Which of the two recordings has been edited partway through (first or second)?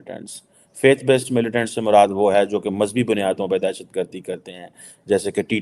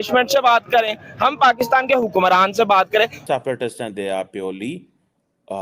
second